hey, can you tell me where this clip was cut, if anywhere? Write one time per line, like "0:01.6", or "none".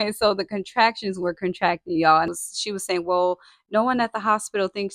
0:02.3